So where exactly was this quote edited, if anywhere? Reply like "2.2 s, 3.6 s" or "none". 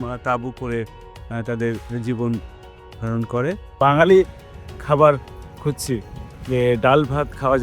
3.7 s